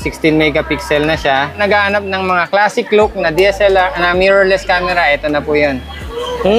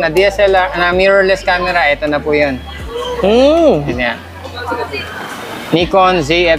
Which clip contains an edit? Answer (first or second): first